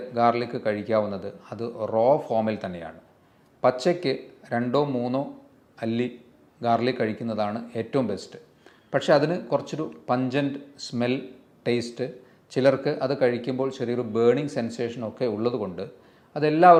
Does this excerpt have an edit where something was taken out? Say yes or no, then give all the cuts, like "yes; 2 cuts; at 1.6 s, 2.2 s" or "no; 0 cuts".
no; 0 cuts